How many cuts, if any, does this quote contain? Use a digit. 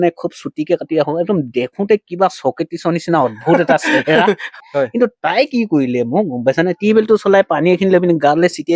1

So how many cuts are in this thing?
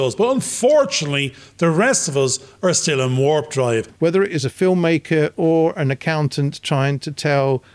1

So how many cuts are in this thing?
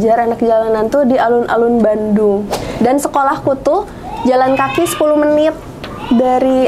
1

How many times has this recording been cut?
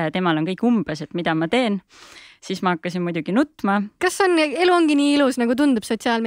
1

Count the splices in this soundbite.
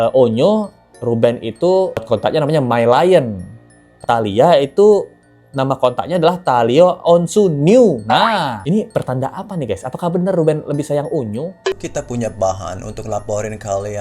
2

